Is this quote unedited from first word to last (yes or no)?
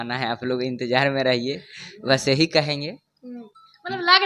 yes